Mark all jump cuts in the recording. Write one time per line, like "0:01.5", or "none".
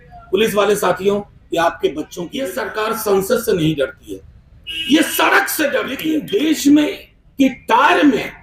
0:02.4
0:06.0